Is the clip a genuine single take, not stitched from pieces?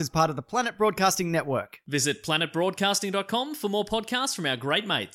yes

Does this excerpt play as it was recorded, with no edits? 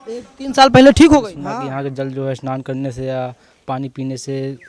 no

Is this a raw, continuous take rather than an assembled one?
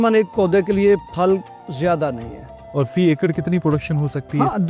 yes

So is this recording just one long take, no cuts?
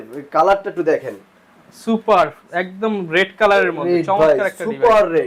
yes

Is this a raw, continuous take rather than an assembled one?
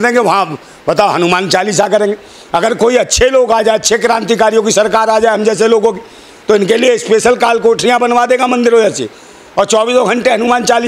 yes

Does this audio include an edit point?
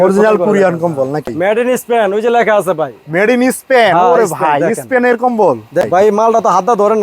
yes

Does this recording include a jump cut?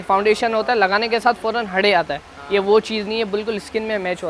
no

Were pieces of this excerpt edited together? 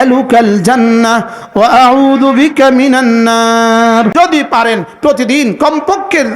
yes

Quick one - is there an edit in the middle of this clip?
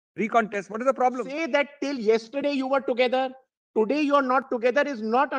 yes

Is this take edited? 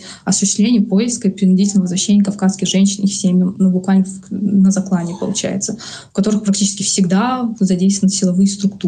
no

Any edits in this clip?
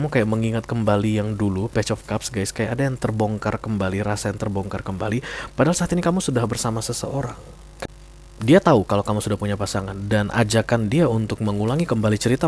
yes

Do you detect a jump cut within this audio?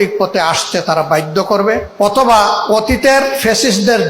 yes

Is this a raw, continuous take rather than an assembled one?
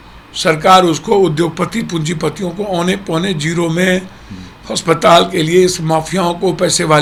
yes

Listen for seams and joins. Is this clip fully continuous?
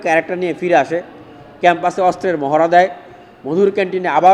yes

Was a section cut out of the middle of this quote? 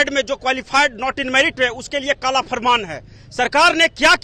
no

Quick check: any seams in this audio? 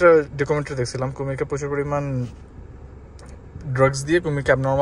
no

